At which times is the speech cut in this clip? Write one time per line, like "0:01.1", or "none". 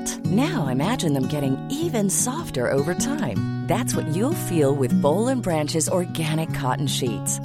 none